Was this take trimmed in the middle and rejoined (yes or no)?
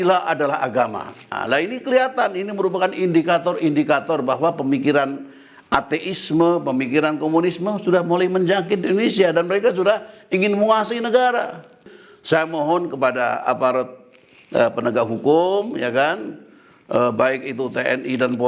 yes